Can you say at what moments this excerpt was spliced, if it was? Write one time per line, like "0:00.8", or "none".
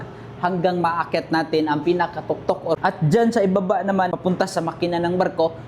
0:02.8
0:04.1